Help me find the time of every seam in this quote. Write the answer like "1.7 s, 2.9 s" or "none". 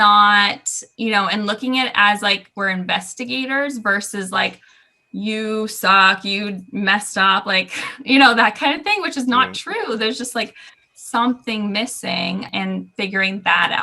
12.5 s